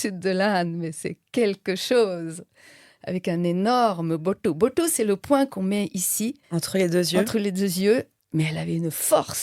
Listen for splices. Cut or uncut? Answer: cut